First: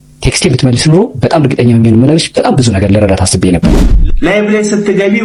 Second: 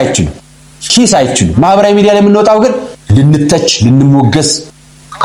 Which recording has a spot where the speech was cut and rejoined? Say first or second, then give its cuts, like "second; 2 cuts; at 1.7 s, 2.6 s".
first; 1 cut; at 4.1 s